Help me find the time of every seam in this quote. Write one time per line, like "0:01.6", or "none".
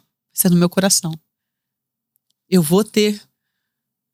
none